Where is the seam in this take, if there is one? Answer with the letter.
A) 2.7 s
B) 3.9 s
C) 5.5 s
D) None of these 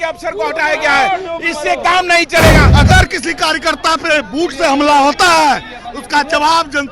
A